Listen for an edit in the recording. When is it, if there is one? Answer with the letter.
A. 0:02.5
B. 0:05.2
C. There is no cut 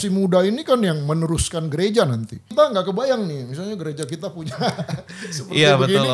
A